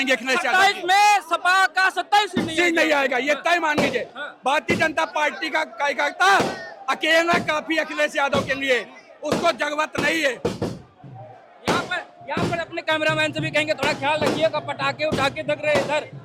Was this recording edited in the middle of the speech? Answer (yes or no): no